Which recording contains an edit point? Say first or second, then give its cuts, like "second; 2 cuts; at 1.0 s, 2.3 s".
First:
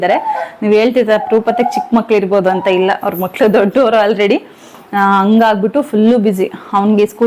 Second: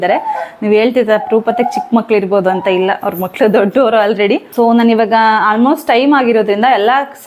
second; 1 cut; at 4.5 s